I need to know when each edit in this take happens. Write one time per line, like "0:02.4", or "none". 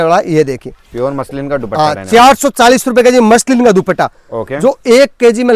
none